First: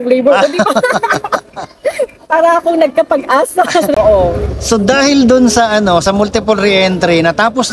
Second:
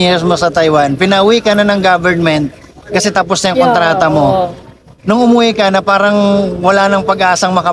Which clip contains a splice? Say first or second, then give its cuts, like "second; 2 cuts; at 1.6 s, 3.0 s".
first; 1 cut; at 3.9 s